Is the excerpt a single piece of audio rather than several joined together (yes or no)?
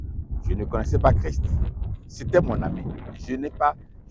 yes